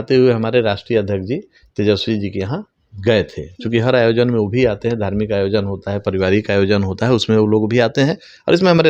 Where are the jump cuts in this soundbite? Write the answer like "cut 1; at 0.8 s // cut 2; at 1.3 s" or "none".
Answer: none